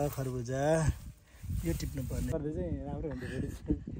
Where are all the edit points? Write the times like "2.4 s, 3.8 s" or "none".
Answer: 2.3 s